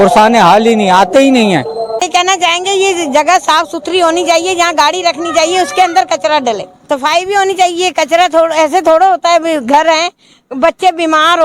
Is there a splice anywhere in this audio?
yes; 2 cuts; at 2.0 s, 6.7 s

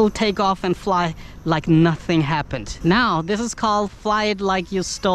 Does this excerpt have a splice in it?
yes; 1 cut; at 2.6 s

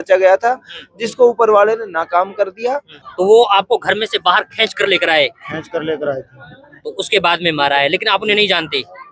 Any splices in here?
yes; 1 cut; at 3.0 s

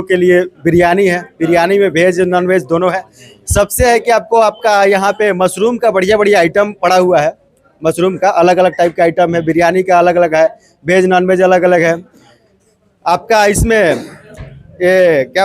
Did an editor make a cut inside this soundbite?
no; 0 cuts

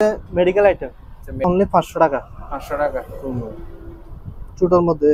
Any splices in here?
yes; 1 cut; at 1.4 s

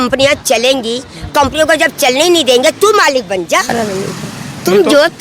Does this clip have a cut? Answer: yes; 1 cut; at 3.7 s

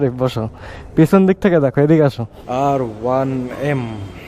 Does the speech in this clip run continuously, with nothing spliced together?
no; 1 cut; at 2.3 s

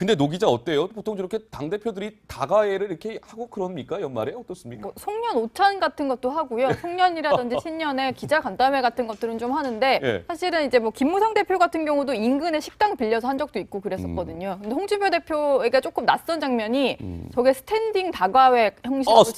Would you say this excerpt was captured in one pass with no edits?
no; 1 cut; at 3.7 s

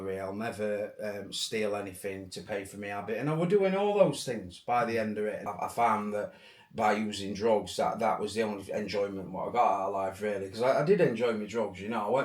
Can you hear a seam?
yes; 1 cut; at 5.5 s

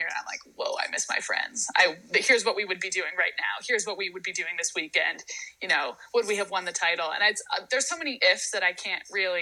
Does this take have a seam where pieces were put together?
no; 0 cuts

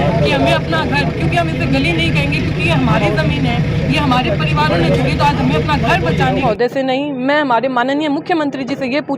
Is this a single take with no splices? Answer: no; 1 cut; at 6.4 s

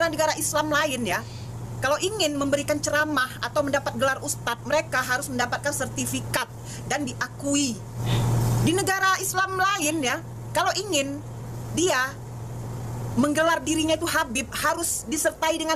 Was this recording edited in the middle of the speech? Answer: yes; 1 cut; at 8.0 s

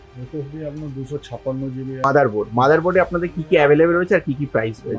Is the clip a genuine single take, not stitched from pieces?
no; 1 cut; at 2.0 s

